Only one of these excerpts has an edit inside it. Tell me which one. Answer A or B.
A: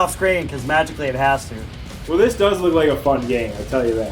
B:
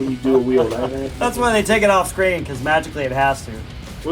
B